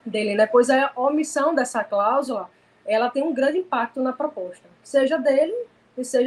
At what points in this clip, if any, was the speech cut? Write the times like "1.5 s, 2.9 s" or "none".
none

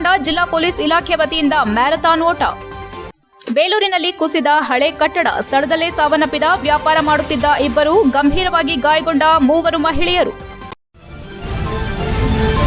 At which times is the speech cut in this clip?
10.7 s

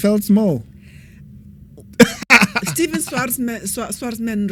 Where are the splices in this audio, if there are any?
none

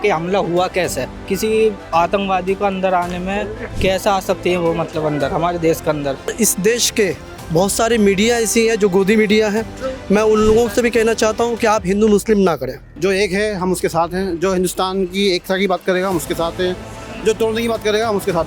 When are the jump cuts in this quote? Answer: 1.2 s, 6.3 s, 12.8 s, 17.0 s

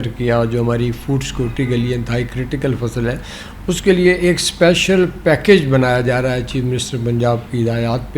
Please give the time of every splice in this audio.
none

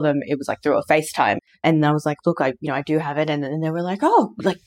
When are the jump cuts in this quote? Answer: 1.5 s

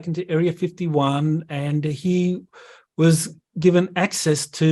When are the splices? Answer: none

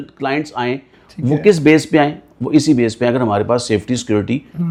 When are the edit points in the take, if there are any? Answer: none

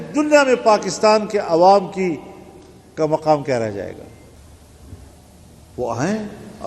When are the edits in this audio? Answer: 4.4 s

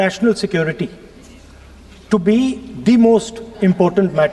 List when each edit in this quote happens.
none

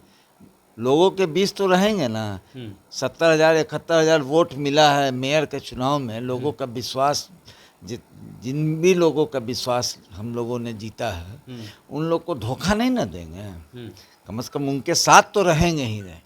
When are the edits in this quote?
none

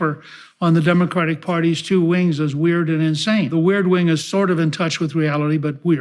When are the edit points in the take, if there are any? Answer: 3.5 s

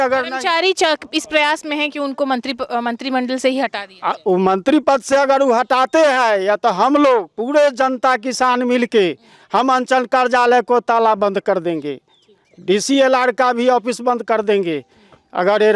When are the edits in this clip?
none

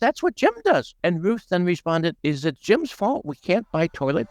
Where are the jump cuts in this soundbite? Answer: 0.9 s, 2.2 s

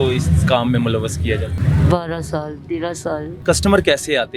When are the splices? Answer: 1.6 s, 3.4 s

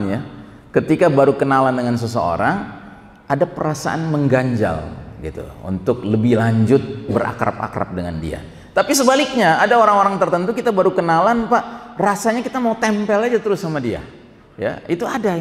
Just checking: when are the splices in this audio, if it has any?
none

